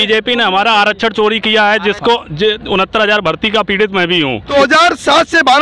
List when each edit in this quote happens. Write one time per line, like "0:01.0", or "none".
0:04.5